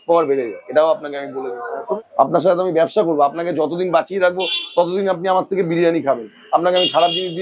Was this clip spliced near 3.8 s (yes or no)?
no